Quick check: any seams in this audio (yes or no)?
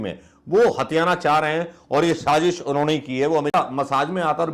yes